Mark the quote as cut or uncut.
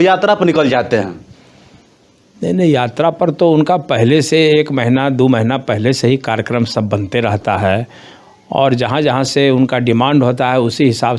uncut